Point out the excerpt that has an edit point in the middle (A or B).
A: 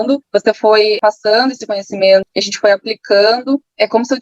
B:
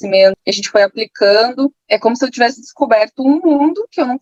A